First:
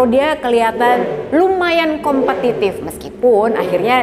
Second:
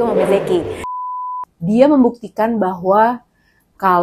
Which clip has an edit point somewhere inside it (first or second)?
second